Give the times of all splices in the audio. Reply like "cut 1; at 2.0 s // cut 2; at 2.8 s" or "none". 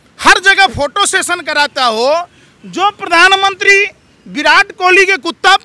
none